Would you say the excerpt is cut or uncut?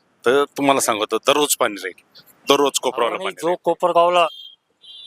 cut